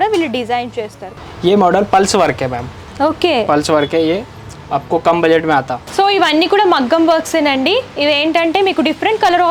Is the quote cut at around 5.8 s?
yes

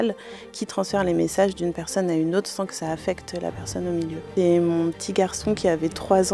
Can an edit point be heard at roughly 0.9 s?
no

